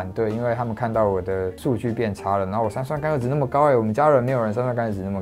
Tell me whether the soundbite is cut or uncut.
uncut